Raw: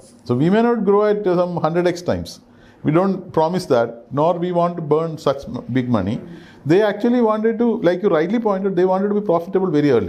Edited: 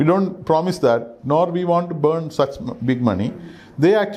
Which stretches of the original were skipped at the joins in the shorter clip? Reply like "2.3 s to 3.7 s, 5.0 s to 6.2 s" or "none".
none